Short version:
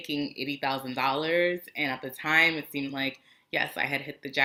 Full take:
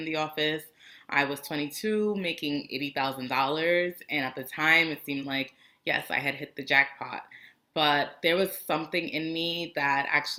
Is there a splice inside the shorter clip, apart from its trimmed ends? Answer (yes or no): no